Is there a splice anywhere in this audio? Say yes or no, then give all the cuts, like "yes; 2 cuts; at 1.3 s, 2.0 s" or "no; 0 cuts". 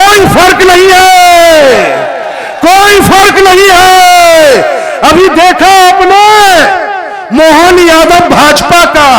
no; 0 cuts